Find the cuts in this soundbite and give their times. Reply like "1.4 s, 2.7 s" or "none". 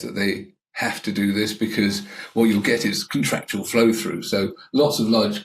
none